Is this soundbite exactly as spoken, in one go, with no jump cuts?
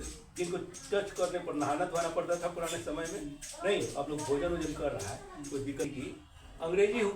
no; 1 cut; at 6.0 s

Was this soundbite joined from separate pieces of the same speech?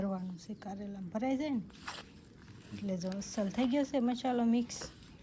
no; 0 cuts

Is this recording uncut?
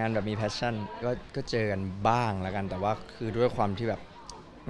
no; 1 cut; at 1.0 s

